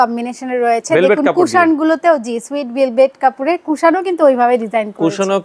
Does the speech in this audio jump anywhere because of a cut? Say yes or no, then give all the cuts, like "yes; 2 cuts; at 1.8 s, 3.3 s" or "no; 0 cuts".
no; 0 cuts